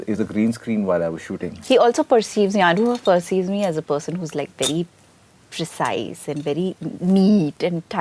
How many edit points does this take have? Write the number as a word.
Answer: one